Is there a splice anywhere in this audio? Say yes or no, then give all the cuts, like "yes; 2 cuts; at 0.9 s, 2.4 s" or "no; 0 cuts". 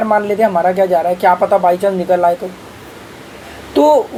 no; 0 cuts